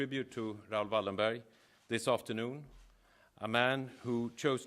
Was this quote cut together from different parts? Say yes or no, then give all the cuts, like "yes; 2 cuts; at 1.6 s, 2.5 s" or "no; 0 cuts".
yes; 1 cut; at 2.8 s